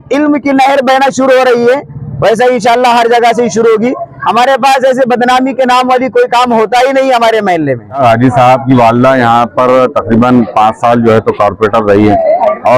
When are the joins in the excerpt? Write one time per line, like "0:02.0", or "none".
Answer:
0:08.0